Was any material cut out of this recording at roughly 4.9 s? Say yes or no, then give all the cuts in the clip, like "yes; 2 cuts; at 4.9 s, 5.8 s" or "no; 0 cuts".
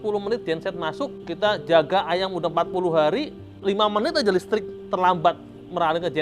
no; 2 cuts; at 1.2 s, 3.5 s